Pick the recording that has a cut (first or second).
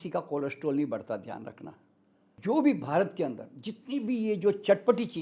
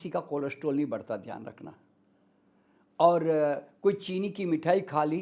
first